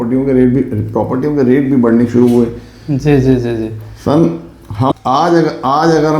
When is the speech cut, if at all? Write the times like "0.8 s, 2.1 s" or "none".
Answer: 4.9 s